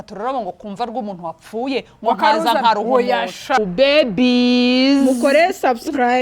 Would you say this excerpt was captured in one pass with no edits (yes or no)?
no